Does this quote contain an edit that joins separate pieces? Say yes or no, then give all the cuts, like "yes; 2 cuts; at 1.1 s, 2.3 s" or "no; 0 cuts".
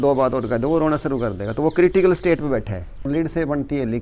yes; 1 cut; at 3.1 s